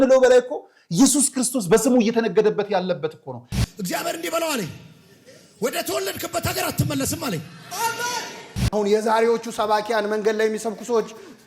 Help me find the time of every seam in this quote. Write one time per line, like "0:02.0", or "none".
0:03.5
0:08.6